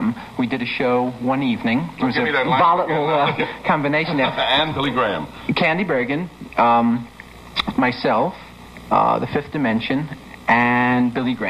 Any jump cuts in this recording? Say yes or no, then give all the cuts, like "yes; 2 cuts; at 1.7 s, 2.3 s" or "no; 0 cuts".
yes; 1 cut; at 8.8 s